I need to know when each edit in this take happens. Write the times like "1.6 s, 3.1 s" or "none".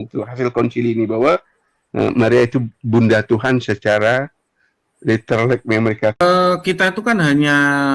6.2 s